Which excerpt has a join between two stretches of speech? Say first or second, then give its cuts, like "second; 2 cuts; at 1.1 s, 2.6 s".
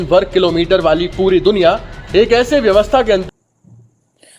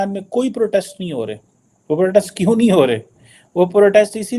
first; 1 cut; at 3.2 s